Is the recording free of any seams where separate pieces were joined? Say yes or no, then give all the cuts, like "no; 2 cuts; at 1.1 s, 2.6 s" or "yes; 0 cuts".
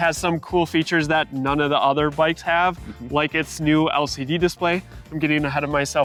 yes; 0 cuts